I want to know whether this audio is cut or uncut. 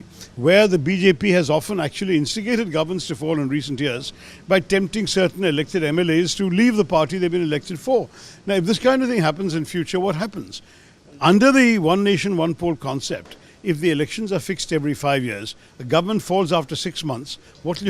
uncut